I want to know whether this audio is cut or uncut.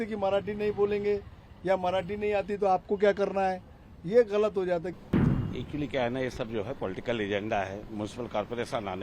cut